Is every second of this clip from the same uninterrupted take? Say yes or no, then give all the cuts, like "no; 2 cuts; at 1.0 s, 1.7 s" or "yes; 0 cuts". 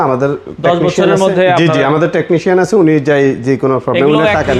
yes; 0 cuts